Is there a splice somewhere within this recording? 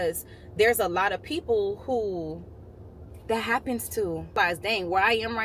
yes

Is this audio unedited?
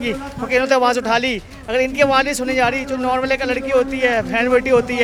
yes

